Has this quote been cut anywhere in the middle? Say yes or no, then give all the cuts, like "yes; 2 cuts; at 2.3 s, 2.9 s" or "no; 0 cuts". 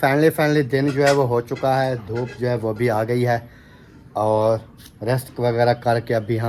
no; 0 cuts